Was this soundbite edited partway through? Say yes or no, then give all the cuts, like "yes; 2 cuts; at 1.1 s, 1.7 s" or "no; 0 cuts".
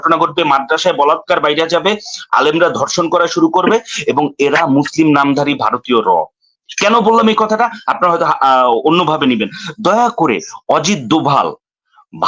no; 0 cuts